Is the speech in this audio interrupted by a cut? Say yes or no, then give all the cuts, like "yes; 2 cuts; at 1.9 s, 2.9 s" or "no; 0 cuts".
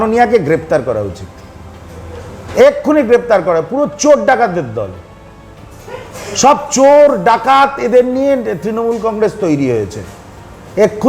no; 0 cuts